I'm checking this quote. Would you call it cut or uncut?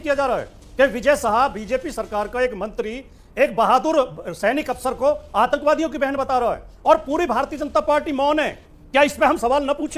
uncut